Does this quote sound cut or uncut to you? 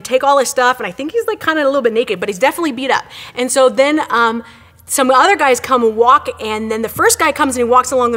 cut